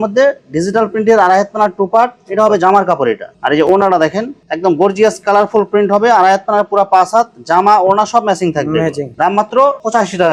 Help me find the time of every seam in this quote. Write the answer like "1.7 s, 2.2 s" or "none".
none